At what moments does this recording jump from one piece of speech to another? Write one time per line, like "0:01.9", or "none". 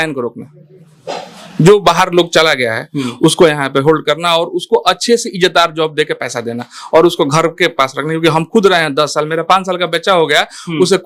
none